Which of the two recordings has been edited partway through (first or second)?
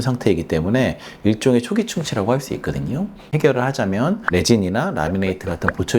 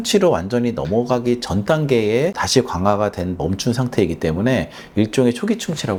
first